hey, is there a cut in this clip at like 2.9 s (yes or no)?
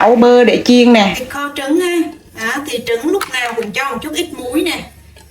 no